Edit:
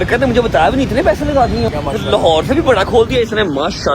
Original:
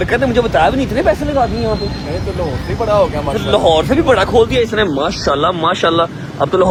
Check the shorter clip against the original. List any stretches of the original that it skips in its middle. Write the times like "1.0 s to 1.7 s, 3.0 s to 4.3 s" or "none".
1.7 s to 3.1 s